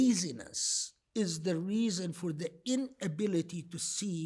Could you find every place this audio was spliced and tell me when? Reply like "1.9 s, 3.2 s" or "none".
none